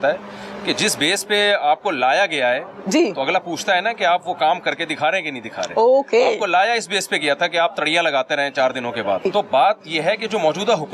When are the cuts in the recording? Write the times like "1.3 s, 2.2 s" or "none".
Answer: 9.2 s